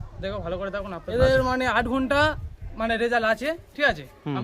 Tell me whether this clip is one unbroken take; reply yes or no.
no